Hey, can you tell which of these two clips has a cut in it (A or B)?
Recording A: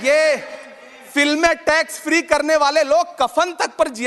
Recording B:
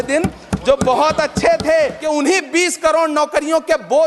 B